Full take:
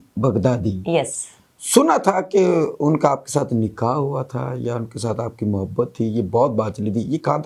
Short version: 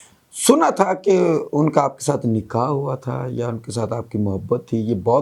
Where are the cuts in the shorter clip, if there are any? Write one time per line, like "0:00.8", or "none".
none